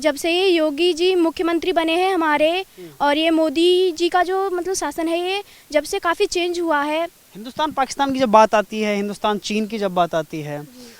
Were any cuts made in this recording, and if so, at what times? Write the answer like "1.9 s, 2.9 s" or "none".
none